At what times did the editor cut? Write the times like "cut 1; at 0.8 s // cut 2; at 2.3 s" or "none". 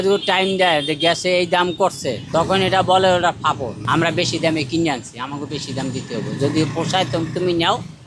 cut 1; at 2.1 s // cut 2; at 3.8 s